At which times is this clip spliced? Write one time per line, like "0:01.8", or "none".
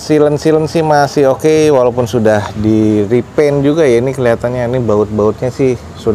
none